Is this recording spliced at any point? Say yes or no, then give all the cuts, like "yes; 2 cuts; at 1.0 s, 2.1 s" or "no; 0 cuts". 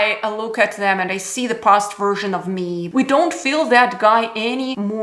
yes; 1 cut; at 2.9 s